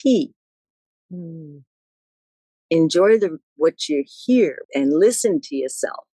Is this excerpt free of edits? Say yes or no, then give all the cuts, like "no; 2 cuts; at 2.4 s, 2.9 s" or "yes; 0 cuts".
no; 1 cut; at 4.6 s